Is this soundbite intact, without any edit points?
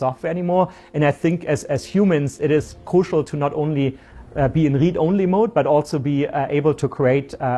yes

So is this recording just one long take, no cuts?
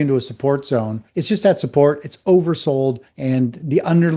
no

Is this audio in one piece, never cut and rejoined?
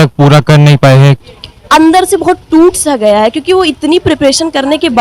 no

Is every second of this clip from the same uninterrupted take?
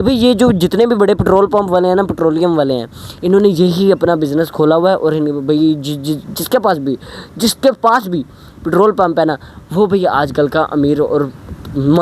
yes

